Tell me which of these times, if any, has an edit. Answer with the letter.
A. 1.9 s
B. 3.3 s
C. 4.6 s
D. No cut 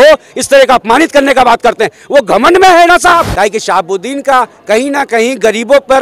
B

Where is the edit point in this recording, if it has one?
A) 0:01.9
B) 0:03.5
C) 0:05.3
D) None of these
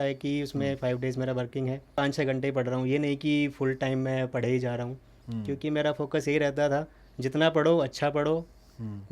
A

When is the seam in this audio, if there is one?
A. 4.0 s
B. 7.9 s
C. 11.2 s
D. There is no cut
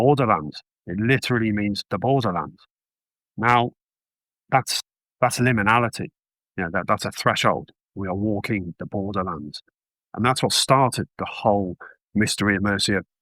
D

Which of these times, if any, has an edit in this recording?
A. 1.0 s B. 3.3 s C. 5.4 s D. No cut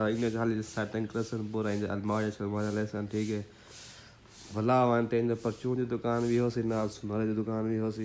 D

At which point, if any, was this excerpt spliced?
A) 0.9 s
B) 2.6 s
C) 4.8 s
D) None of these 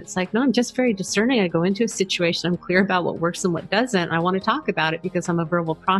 D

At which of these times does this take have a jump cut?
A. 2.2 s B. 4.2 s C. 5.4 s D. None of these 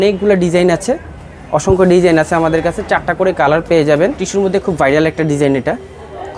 B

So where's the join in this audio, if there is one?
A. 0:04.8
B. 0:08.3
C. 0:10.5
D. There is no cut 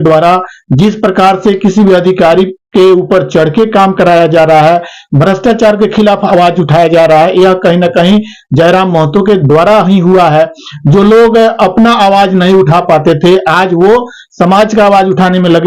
D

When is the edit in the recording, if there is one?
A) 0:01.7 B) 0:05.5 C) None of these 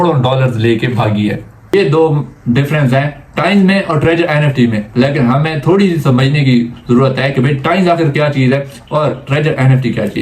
A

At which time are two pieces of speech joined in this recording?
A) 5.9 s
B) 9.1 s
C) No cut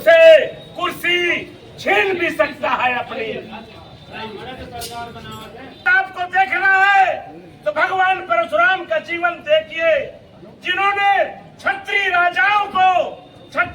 A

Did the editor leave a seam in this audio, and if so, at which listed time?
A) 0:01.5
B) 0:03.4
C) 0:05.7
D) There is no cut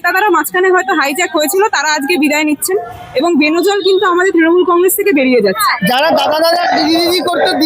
C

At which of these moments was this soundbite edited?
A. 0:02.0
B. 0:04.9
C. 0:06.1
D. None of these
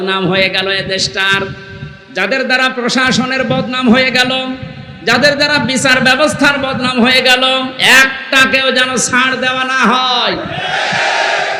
D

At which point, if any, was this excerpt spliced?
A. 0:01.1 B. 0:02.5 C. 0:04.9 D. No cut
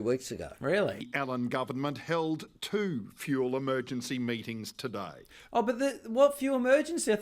A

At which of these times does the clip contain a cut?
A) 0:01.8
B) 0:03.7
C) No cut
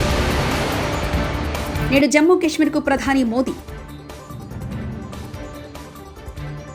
C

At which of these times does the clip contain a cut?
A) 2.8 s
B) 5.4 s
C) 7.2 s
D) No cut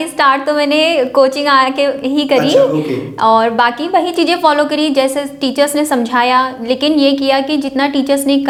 D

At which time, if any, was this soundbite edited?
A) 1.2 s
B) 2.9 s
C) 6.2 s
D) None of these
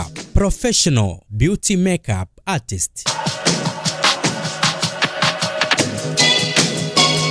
B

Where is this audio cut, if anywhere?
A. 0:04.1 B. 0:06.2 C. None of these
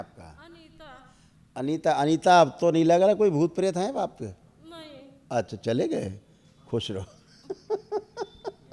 C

